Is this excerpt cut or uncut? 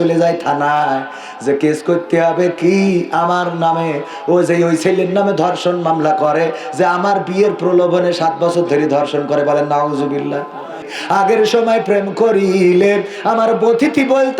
cut